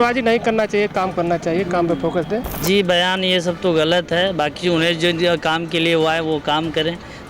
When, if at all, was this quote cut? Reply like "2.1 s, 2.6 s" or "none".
2.5 s